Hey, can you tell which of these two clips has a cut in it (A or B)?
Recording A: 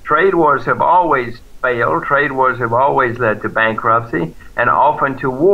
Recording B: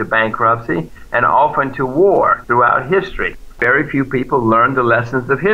B